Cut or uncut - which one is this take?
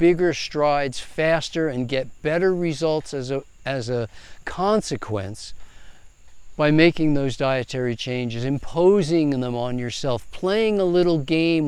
uncut